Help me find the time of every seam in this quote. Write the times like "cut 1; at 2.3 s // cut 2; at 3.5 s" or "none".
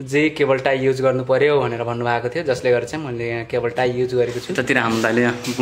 cut 1; at 4.5 s